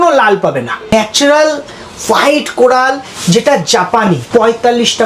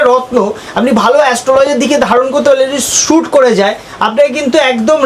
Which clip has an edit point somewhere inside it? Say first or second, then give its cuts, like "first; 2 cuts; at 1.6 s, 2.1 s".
first; 2 cuts; at 0.9 s, 4.2 s